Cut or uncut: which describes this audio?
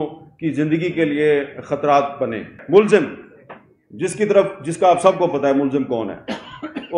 cut